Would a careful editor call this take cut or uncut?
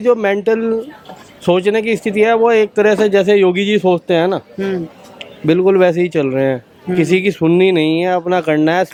uncut